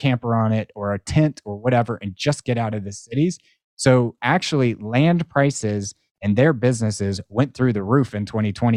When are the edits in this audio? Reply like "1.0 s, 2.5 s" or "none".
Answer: none